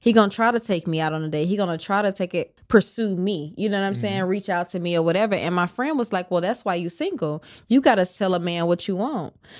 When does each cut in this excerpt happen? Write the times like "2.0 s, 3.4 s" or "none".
2.5 s